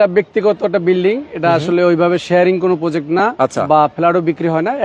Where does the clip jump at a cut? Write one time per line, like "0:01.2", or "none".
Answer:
none